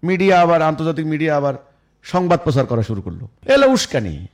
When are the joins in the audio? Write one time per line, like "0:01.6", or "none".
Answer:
0:03.3